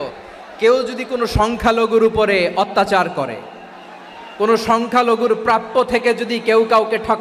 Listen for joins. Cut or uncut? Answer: uncut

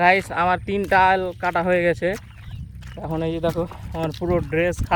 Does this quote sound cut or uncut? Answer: uncut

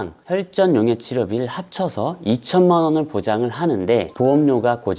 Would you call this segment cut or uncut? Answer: uncut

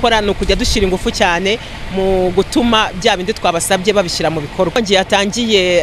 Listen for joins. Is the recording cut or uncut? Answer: cut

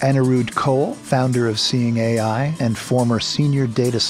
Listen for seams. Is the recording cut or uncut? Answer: uncut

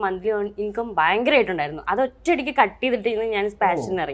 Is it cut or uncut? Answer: uncut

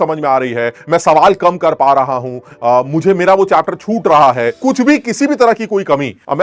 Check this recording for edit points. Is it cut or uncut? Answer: uncut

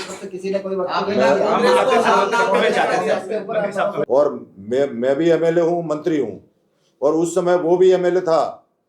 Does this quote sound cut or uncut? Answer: cut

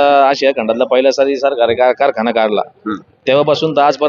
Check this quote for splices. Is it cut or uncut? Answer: uncut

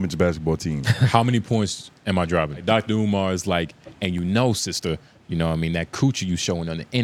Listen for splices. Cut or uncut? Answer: cut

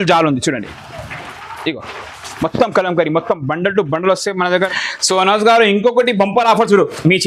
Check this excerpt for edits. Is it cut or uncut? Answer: cut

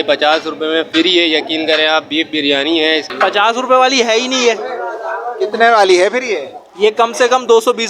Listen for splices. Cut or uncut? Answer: cut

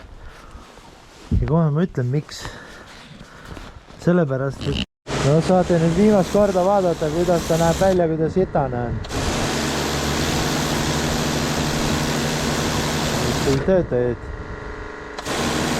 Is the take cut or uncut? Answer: cut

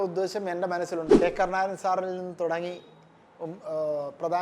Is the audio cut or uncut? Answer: cut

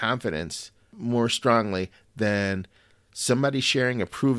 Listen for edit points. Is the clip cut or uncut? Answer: cut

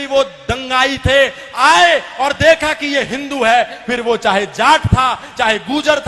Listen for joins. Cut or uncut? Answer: uncut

